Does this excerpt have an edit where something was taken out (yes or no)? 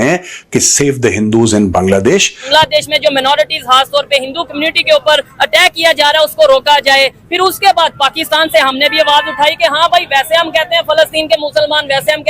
yes